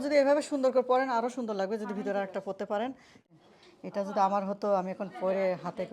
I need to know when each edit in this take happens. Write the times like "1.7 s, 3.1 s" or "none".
3.3 s